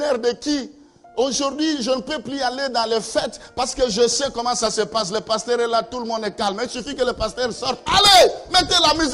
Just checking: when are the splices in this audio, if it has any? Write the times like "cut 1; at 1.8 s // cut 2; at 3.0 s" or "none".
none